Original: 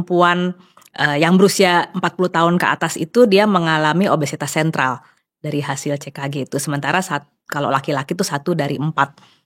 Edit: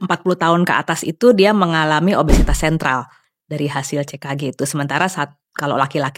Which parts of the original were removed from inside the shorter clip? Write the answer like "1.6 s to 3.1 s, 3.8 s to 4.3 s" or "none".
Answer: none